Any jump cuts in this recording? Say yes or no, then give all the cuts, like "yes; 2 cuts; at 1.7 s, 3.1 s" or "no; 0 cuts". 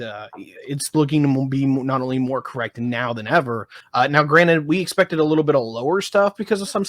yes; 1 cut; at 3.8 s